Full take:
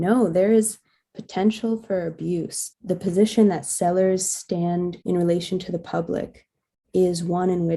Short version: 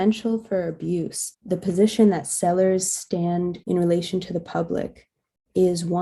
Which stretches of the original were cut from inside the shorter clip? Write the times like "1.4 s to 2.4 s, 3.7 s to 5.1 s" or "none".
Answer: none